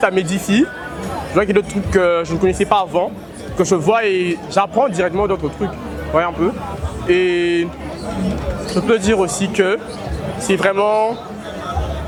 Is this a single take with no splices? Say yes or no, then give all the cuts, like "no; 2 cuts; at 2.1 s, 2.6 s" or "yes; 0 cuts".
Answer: yes; 0 cuts